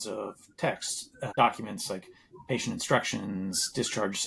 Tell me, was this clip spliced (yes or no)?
yes